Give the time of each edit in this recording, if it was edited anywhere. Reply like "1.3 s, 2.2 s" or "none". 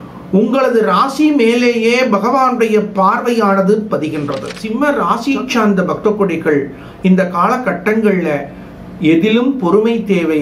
4.8 s